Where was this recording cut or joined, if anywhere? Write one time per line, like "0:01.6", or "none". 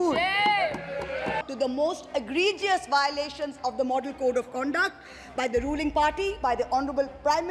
0:01.4